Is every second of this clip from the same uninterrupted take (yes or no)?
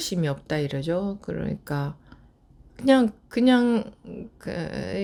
yes